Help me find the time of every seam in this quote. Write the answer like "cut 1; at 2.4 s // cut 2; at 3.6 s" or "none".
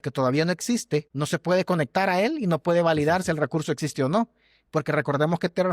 cut 1; at 1.1 s